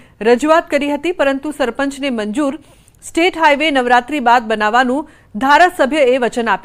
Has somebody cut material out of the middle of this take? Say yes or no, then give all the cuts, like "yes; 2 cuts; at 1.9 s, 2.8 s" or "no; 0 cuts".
no; 0 cuts